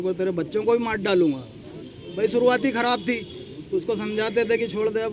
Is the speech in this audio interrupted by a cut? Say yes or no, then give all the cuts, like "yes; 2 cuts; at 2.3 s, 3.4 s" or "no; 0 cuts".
no; 0 cuts